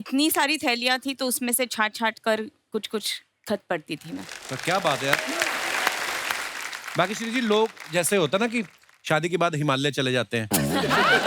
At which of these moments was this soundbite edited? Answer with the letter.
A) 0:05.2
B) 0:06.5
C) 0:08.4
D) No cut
B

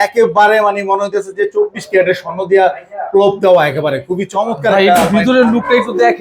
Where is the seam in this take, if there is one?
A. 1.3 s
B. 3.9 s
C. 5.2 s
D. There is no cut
D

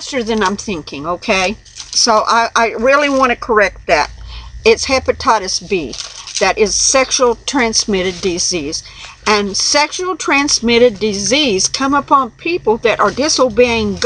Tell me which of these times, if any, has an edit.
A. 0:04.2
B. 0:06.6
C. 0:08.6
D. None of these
C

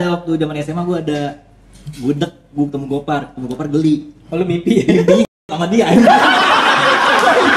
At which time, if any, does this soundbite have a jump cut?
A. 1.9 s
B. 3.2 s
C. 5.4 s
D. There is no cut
D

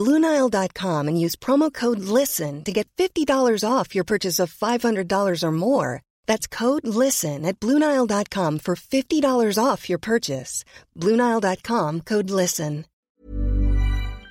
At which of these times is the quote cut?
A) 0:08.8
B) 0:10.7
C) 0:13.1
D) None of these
C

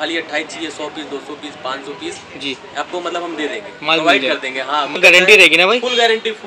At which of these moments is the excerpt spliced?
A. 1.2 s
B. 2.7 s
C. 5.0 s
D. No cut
C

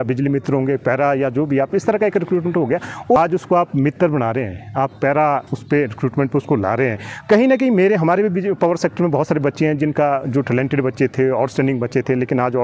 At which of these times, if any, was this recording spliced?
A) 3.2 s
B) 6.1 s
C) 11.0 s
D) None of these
A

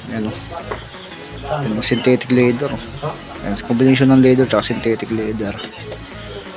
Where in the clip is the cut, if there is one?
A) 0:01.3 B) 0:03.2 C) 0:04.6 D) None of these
D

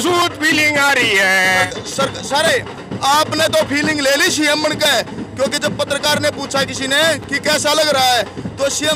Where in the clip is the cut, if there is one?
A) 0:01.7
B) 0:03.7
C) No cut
A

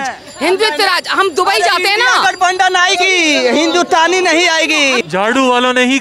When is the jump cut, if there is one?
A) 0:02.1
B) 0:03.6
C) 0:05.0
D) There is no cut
C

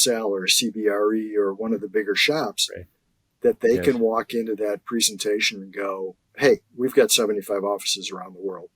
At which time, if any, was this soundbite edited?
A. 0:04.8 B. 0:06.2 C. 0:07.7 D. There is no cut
B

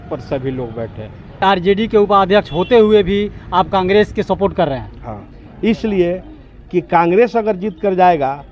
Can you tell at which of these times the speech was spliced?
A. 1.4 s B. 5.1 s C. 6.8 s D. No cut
A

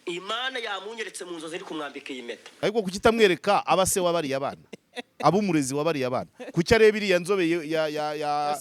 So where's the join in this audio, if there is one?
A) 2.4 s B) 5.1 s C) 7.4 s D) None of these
A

